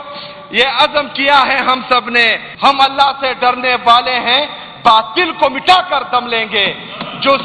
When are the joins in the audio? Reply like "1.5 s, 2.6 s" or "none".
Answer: 2.4 s